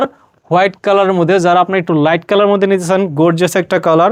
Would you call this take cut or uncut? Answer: uncut